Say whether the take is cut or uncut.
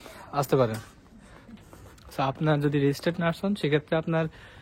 cut